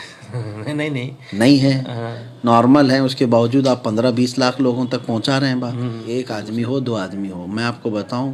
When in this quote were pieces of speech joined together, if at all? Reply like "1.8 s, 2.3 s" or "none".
6.0 s